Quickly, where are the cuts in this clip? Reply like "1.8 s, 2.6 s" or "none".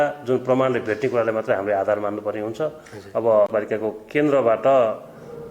3.5 s